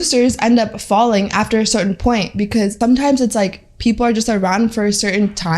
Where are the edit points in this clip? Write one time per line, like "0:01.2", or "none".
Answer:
0:02.7